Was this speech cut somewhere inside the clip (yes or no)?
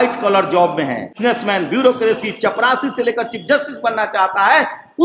yes